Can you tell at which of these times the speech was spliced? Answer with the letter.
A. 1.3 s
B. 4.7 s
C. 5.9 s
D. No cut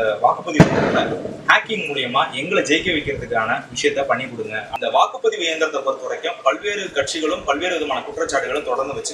B